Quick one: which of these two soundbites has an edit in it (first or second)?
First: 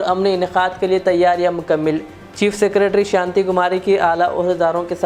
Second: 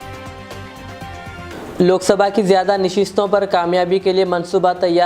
second